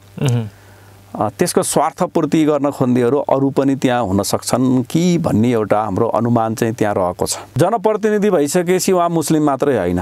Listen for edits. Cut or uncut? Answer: cut